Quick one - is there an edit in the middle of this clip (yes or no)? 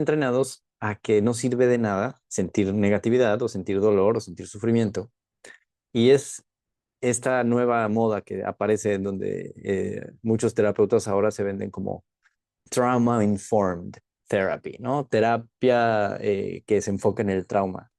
yes